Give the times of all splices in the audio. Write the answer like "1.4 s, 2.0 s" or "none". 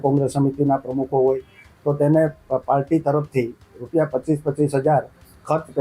none